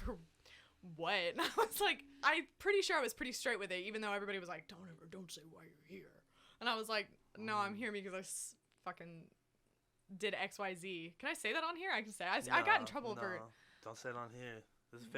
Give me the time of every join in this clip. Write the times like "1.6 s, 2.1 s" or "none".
2.1 s